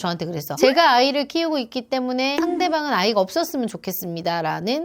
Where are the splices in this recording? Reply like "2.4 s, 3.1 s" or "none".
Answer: none